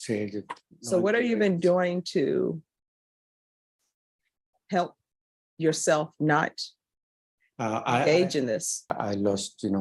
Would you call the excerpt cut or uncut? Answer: cut